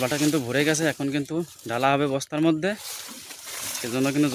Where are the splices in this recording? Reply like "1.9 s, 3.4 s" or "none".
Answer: none